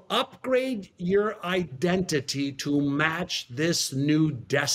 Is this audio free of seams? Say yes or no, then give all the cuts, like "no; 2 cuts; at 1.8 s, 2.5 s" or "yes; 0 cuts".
yes; 0 cuts